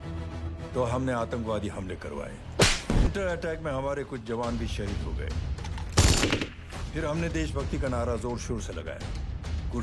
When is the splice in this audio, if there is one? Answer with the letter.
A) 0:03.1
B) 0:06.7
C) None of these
A